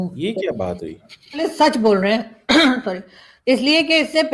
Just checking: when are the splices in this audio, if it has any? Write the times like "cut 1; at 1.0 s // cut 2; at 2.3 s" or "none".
cut 1; at 1.5 s